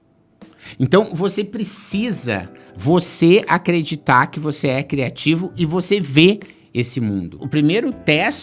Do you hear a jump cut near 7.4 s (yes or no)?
yes